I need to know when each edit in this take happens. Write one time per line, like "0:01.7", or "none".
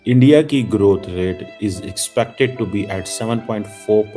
none